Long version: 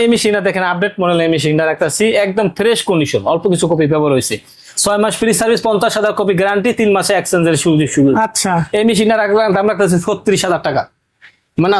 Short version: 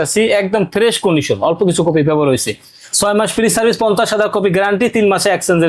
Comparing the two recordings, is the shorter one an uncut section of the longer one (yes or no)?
yes